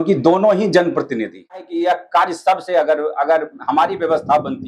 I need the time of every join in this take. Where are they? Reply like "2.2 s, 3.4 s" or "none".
1.7 s